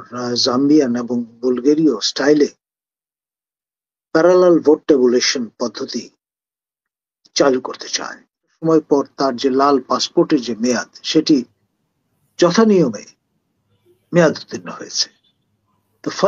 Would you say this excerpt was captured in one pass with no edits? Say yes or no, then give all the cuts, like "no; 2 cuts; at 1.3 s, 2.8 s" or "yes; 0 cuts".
no; 1 cut; at 8.6 s